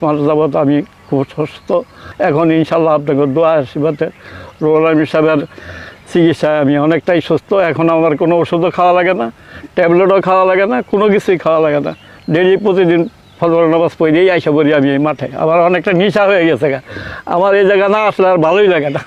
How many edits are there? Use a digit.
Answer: 1